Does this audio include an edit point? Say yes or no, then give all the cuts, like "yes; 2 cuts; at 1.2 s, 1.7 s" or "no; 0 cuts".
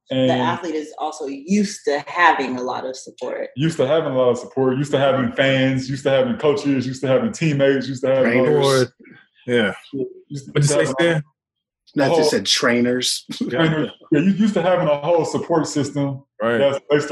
no; 0 cuts